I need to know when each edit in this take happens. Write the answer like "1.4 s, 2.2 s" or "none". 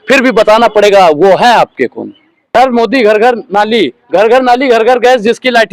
2.5 s